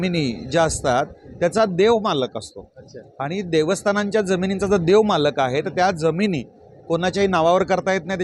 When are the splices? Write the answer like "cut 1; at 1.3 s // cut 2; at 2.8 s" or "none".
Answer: none